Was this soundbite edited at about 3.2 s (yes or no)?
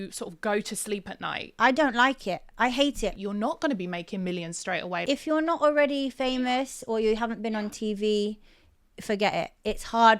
yes